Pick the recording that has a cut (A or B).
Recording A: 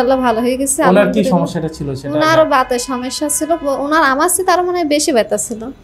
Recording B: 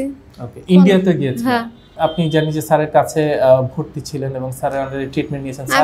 B